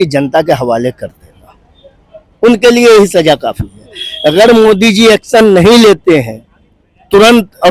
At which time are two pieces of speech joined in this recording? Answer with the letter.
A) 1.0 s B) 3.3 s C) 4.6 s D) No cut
D